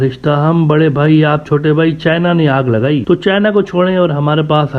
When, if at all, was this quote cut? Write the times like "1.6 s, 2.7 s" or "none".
3.0 s

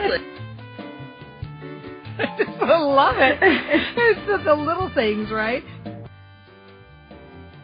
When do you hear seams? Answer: 6.5 s

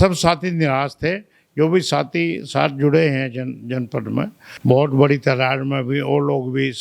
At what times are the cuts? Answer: 4.4 s

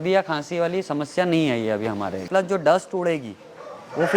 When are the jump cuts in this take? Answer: 2.3 s

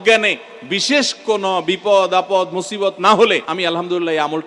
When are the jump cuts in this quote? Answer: 3.5 s

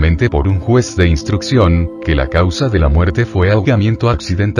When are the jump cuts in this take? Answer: 2.5 s

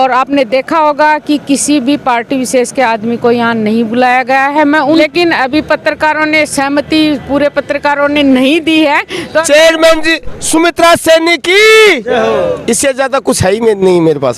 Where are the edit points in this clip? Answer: 5.0 s, 9.2 s

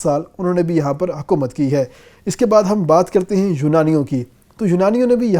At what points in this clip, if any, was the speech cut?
none

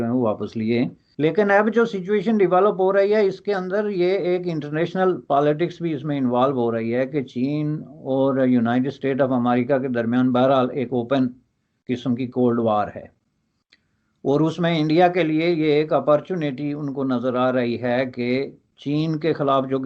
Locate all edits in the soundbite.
1.0 s

